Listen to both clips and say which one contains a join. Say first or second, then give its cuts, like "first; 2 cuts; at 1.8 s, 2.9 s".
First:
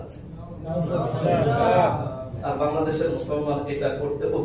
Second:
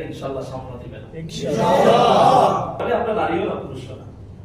second; 1 cut; at 2.8 s